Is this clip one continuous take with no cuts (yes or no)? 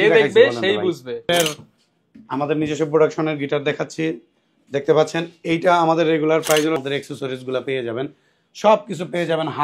no